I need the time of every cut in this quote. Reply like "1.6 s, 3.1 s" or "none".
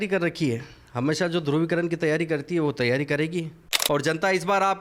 3.7 s